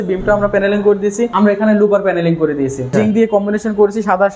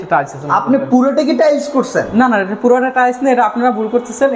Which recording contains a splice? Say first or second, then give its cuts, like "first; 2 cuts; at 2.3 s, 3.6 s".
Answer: first; 2 cuts; at 1.3 s, 2.9 s